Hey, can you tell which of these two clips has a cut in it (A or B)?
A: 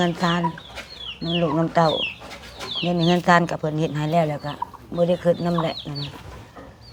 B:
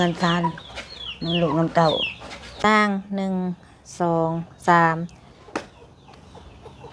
B